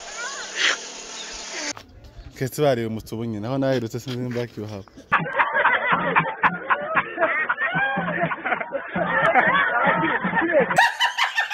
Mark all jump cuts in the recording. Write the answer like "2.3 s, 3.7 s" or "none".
none